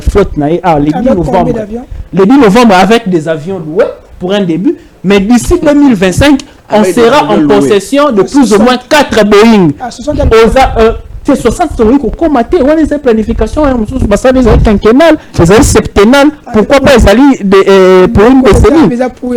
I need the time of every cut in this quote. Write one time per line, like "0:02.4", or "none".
none